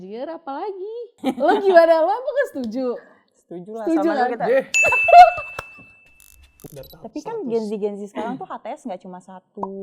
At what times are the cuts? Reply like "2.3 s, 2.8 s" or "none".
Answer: 1.1 s, 6.5 s